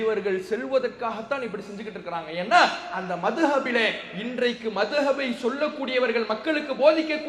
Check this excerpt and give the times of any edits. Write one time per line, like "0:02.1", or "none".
none